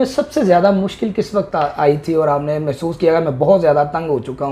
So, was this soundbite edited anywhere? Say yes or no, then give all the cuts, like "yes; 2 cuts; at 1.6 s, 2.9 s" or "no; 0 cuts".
no; 0 cuts